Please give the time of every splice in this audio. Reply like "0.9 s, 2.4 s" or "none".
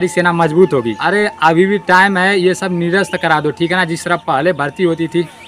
0.9 s